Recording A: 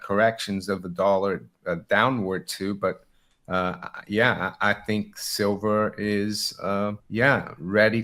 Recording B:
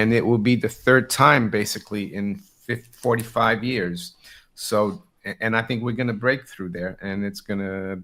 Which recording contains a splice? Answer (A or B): A